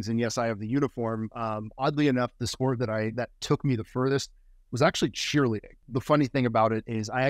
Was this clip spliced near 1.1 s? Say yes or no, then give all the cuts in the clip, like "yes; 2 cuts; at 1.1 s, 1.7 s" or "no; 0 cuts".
no; 1 cut; at 5.8 s